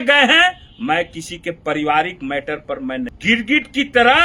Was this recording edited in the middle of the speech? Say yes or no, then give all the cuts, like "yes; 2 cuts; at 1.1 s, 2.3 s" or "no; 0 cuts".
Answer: yes; 1 cut; at 3.1 s